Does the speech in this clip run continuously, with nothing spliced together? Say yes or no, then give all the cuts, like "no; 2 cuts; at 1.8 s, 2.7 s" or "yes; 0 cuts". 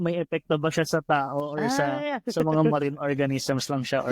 yes; 0 cuts